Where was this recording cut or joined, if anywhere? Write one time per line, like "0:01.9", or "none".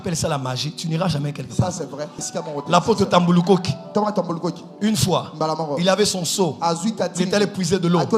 0:02.2